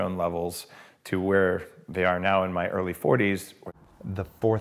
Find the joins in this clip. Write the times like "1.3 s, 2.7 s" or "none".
3.6 s